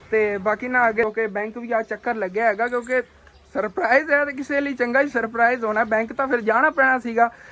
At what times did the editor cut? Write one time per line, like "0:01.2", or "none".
0:01.0